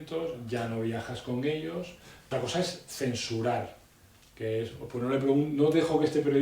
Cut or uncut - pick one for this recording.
cut